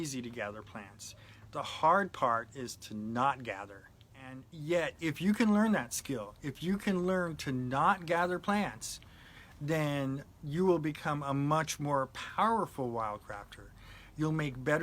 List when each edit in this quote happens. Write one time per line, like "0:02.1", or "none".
0:04.5